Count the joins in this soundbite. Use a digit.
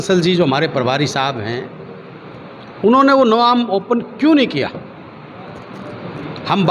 0